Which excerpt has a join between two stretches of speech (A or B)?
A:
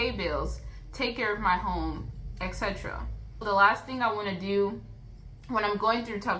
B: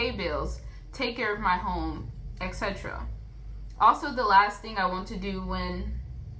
A